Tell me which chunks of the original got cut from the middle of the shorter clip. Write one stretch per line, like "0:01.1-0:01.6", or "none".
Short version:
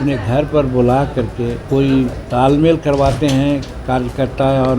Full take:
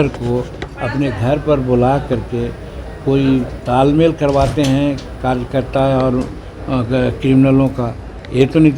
0:02.5-0:02.9